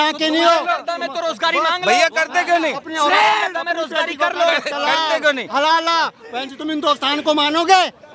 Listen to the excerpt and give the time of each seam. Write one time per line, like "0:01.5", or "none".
none